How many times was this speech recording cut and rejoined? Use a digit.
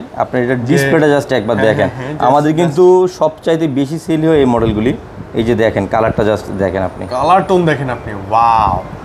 0